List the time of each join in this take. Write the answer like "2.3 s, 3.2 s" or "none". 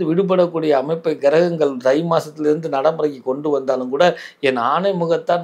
none